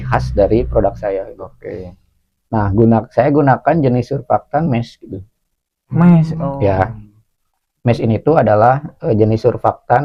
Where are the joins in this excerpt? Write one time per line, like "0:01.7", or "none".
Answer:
none